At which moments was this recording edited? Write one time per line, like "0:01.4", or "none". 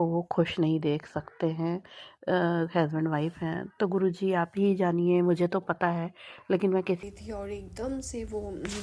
0:07.0